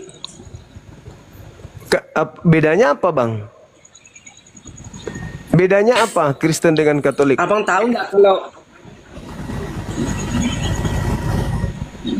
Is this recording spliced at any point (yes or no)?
yes